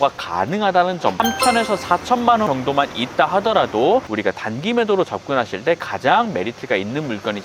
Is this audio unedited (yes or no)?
no